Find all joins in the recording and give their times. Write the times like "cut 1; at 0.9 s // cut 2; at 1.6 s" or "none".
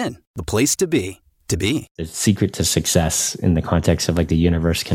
cut 1; at 1.9 s